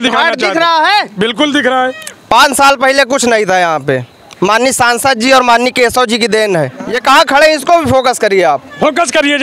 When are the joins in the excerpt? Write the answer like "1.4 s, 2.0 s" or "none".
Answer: 6.9 s